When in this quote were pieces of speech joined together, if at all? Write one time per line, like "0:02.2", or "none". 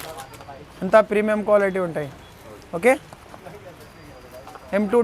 none